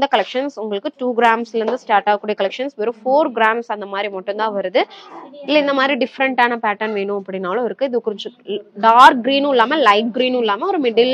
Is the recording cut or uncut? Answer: cut